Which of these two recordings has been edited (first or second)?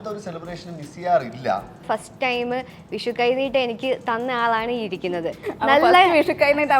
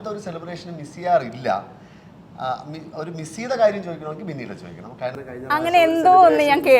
first